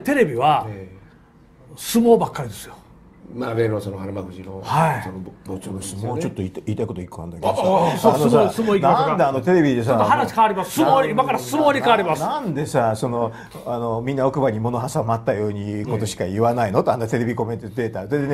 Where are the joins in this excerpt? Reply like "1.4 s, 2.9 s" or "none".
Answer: 7.7 s